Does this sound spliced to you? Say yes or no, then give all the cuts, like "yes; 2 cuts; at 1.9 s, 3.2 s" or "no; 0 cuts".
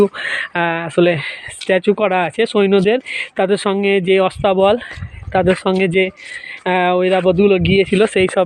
no; 0 cuts